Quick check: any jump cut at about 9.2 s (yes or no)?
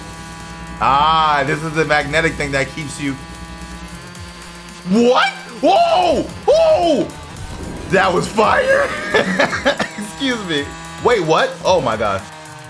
no